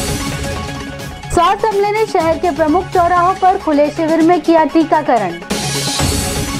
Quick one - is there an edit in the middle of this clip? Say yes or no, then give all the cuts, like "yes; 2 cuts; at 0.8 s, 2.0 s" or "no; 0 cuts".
no; 0 cuts